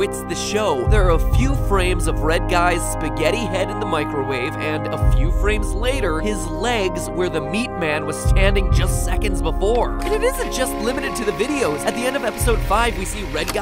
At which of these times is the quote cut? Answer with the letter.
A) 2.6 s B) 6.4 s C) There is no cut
B